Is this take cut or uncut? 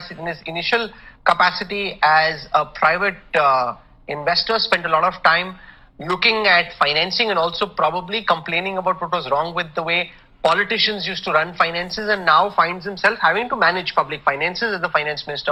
uncut